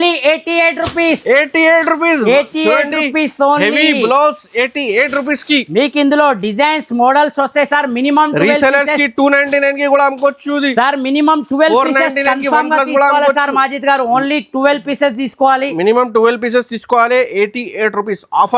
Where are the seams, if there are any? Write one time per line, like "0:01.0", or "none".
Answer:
none